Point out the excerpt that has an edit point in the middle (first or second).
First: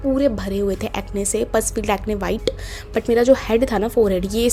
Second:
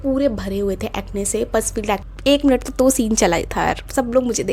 second